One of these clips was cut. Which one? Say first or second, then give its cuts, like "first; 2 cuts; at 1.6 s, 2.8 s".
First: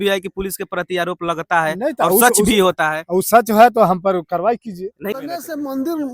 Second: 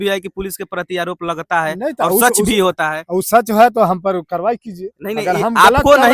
first; 1 cut; at 5.1 s